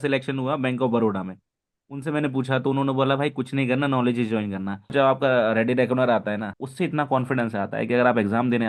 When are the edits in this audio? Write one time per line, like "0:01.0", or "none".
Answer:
0:04.9
0:06.6